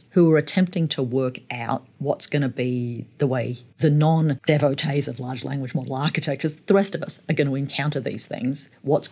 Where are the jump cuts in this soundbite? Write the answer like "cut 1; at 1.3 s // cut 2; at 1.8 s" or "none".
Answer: cut 1; at 3.6 s // cut 2; at 4.4 s